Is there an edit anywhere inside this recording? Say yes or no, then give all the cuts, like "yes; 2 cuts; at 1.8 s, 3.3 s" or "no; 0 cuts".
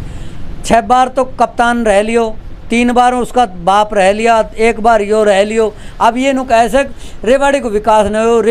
no; 0 cuts